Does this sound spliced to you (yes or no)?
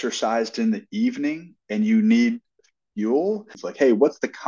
yes